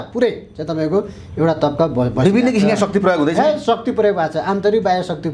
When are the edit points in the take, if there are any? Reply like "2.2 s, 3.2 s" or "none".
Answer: none